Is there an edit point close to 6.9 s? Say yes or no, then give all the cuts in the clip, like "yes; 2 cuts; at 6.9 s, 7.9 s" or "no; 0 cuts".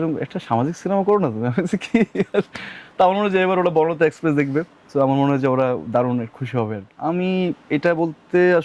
yes; 1 cut; at 6.9 s